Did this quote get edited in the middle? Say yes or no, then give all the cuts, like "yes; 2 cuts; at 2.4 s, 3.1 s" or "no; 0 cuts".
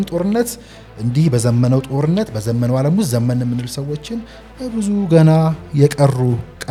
no; 0 cuts